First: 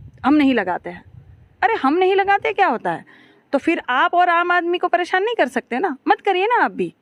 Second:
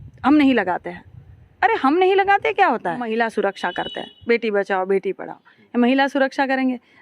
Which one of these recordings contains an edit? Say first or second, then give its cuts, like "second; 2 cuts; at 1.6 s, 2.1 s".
second; 1 cut; at 3.1 s